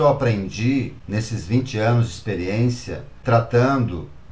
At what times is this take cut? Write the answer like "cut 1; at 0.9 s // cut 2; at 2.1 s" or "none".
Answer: cut 1; at 1.0 s // cut 2; at 3.2 s